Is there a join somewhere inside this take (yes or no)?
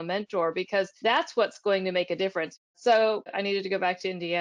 yes